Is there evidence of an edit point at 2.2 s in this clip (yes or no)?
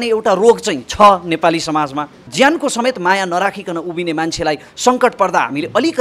yes